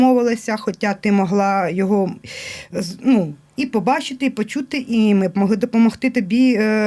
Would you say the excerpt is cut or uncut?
uncut